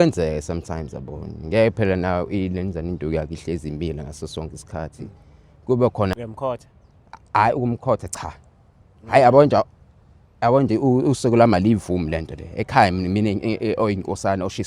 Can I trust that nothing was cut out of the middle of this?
no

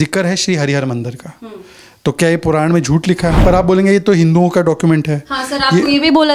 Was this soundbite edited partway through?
yes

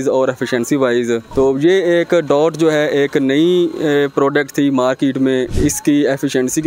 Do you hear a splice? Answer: no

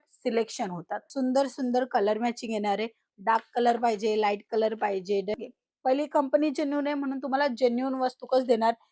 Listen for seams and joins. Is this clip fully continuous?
no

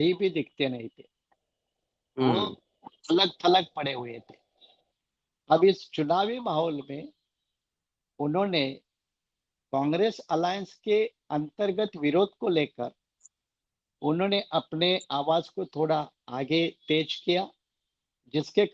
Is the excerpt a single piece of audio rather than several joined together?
yes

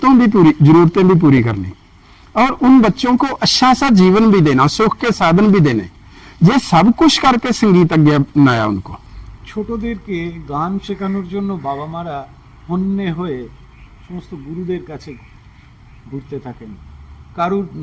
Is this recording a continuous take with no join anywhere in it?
no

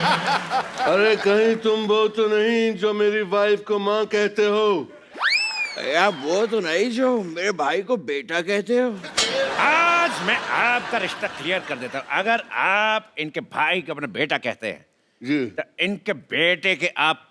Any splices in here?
no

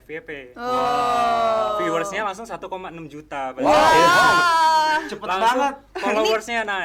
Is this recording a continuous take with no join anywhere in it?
yes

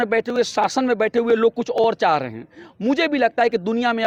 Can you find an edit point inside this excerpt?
no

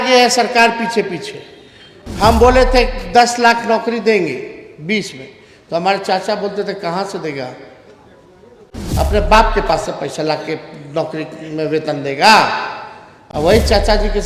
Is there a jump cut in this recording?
no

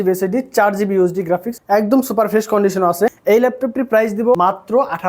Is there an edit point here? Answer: yes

